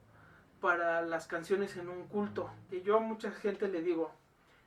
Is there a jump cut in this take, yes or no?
yes